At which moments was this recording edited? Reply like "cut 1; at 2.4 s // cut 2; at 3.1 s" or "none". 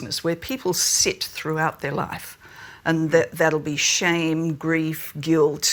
none